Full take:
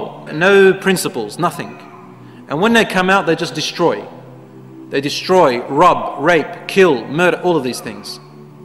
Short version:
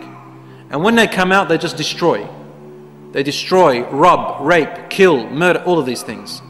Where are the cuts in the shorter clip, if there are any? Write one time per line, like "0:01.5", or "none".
none